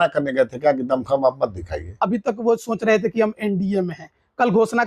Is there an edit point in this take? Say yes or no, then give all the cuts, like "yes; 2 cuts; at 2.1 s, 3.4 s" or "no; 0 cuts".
yes; 1 cut; at 2.0 s